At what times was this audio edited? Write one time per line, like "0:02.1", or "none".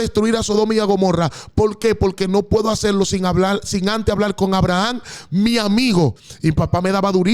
0:06.3